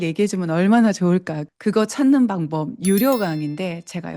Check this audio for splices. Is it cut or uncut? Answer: cut